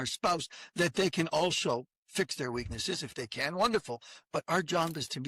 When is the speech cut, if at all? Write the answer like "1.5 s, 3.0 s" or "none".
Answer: 2.0 s